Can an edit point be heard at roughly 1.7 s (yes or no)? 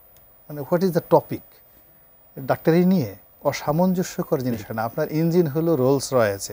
no